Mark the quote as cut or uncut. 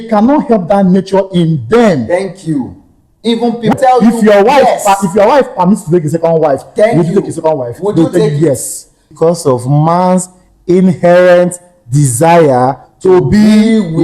cut